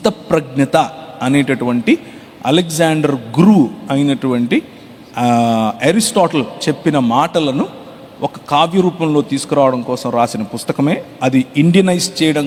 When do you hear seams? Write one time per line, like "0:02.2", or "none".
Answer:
none